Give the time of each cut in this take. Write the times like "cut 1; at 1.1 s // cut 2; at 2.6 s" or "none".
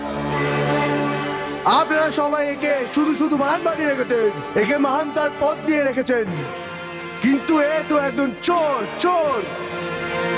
none